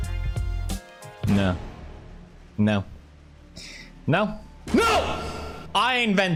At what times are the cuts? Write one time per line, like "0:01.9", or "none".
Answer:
none